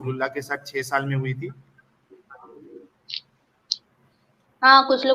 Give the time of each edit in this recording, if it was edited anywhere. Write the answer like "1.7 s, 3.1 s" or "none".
none